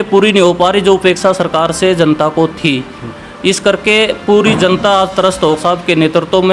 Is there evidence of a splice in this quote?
yes; 1 cut; at 5.6 s

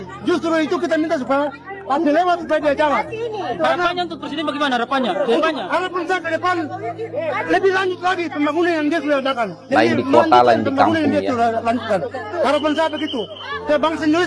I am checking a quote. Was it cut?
no; 0 cuts

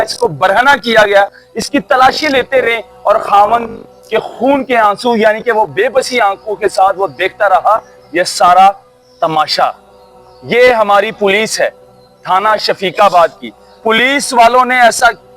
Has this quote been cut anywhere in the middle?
no; 0 cuts

